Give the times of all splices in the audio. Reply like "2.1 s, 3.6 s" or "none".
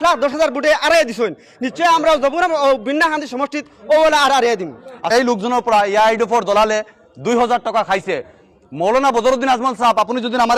5.0 s